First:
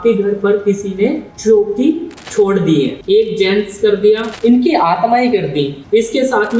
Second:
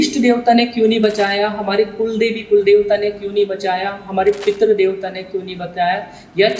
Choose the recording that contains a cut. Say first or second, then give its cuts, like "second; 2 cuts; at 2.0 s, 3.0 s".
first; 5 cuts; at 1.3 s, 2.1 s, 3.0 s, 4.3 s, 5.8 s